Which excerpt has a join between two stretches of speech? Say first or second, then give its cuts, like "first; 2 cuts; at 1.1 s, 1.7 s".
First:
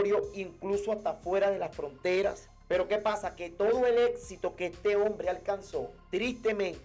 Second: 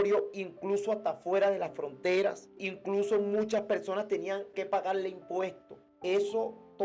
first; 2 cuts; at 2.5 s, 6.0 s